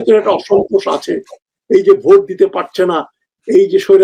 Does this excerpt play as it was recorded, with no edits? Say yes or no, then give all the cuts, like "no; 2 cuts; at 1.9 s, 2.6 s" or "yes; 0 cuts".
yes; 0 cuts